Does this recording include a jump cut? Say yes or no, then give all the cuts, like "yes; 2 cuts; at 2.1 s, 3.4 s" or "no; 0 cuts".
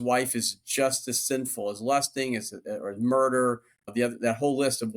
yes; 1 cut; at 3.8 s